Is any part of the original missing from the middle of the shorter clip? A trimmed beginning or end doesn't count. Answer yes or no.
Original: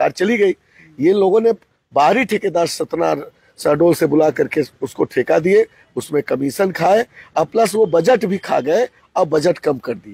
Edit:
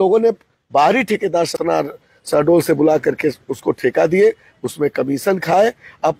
yes